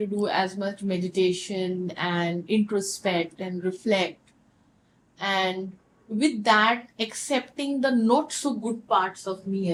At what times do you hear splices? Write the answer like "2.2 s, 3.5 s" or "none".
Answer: none

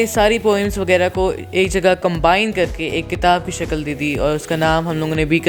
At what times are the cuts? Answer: none

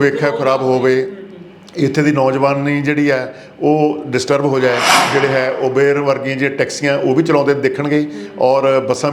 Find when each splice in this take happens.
5.0 s

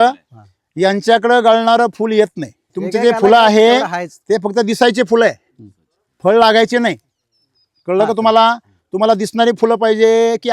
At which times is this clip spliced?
2.8 s

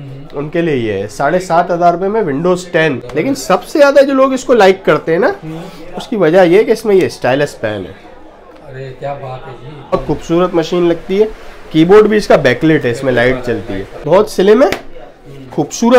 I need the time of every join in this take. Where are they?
3.0 s, 9.9 s, 14.0 s

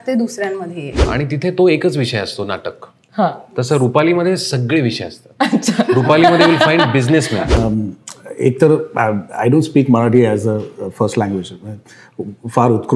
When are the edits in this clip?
1.0 s, 7.4 s

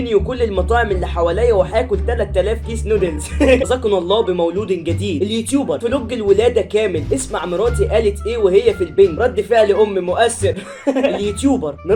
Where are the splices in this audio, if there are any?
3.7 s, 11.2 s

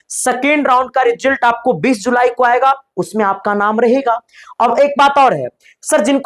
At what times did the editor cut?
none

